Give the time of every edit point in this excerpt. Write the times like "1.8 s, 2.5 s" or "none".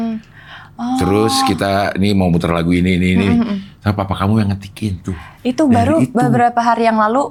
none